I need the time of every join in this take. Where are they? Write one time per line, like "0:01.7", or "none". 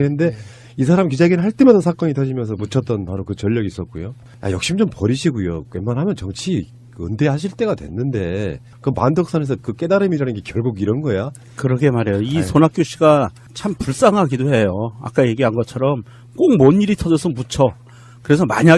0:11.0